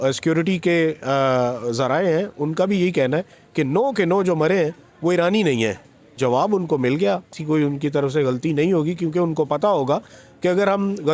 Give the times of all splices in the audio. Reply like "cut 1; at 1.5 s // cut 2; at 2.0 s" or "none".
cut 1; at 6.2 s // cut 2; at 7.3 s